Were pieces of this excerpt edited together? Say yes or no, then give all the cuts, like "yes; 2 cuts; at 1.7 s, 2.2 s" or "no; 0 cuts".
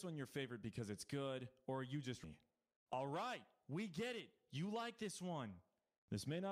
yes; 1 cut; at 2.2 s